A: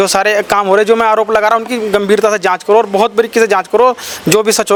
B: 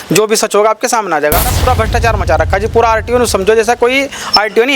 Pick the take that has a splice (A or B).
B